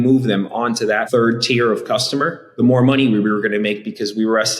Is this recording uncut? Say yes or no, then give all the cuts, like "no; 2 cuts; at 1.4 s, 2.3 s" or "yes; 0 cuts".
no; 2 cuts; at 1.0 s, 2.4 s